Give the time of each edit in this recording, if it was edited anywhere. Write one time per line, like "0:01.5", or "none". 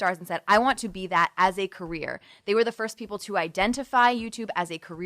none